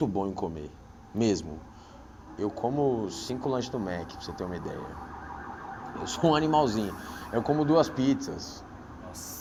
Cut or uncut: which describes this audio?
uncut